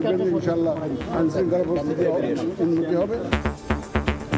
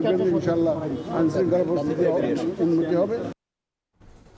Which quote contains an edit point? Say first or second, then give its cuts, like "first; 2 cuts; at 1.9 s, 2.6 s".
first; 1 cut; at 3.3 s